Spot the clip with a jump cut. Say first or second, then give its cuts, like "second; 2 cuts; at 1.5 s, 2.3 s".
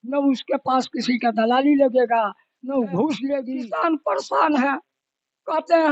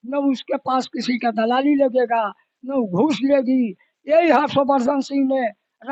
first; 1 cut; at 3.6 s